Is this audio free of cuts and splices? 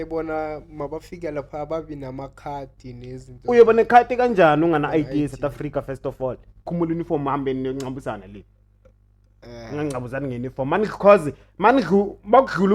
no; 1 cut; at 6.7 s

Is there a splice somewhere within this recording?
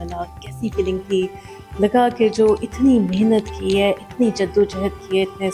no; 0 cuts

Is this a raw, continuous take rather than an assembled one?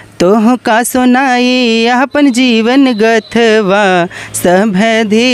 yes; 0 cuts

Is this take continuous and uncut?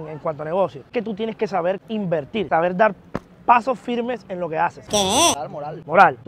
no; 1 cut; at 5.4 s

